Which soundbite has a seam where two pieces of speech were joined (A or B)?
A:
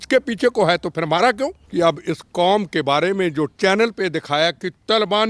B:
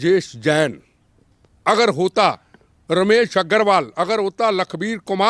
A